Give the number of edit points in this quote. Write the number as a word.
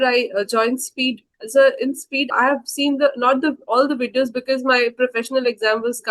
two